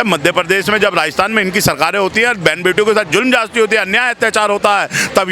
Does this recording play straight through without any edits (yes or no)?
yes